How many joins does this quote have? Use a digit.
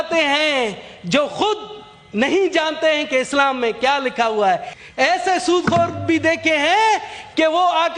1